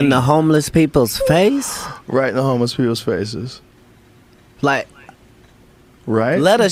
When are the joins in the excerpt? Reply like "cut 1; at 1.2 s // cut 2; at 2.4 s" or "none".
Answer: none